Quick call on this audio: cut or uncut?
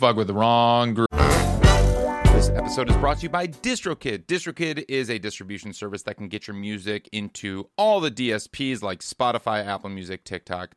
cut